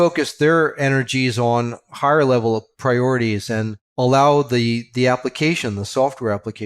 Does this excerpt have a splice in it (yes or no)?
yes